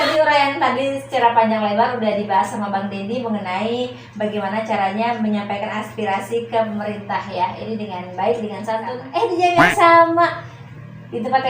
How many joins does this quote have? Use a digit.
1